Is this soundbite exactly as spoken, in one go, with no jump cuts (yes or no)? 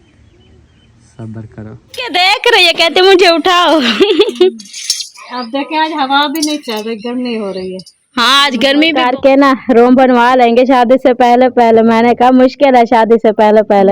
no